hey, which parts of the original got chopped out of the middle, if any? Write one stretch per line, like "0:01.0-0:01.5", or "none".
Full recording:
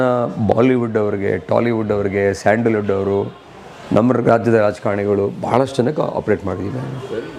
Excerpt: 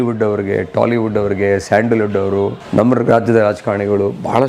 0:03.3-0:03.8